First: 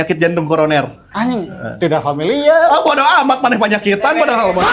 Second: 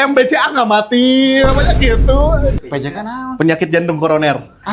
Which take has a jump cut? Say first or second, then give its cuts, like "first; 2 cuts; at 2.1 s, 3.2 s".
second; 1 cut; at 2.6 s